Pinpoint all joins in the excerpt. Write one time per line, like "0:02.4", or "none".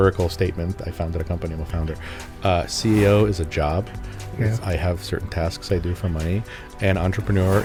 none